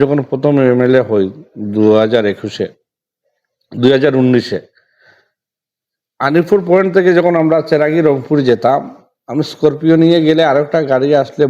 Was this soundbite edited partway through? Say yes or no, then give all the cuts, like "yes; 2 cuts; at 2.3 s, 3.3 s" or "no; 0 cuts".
no; 0 cuts